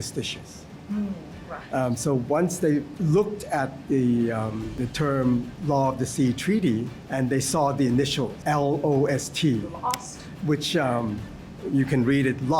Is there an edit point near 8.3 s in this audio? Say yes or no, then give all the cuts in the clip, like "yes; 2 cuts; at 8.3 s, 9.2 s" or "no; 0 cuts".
yes; 4 cuts; at 2.9 s, 4.7 s, 7.0 s, 8.3 s